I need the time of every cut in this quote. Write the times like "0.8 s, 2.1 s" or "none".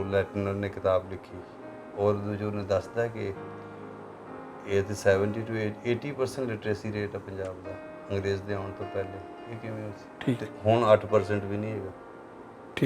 10.1 s